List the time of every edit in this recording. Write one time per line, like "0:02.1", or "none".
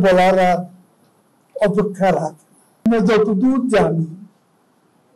0:02.9